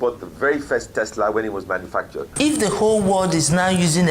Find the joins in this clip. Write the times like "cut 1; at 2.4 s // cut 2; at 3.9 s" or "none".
cut 1; at 2.2 s